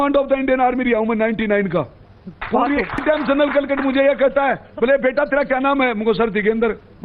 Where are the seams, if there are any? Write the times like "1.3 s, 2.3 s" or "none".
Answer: 3.0 s